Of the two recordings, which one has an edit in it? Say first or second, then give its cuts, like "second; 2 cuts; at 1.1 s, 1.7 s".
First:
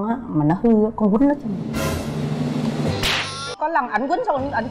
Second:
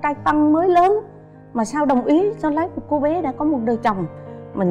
first; 1 cut; at 3.5 s